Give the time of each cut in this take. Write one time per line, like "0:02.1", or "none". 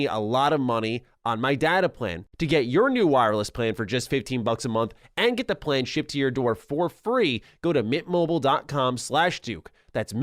0:02.2